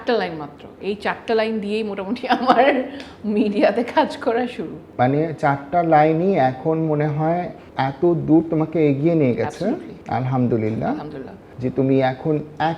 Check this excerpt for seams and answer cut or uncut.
uncut